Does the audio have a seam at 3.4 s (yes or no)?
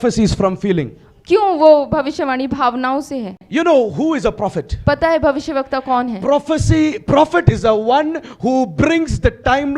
yes